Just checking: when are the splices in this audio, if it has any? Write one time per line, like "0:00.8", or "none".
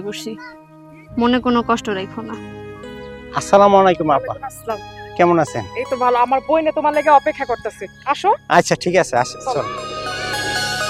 none